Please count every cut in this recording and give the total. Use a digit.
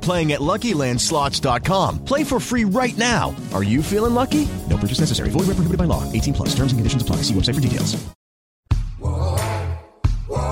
1